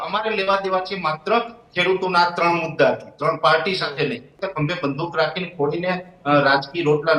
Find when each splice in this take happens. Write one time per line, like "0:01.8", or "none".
0:04.3